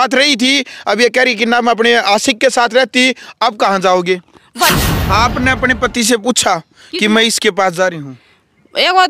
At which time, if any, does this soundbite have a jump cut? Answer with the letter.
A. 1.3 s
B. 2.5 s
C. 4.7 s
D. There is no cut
C